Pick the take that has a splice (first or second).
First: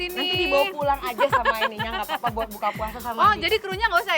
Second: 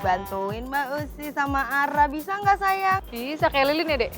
second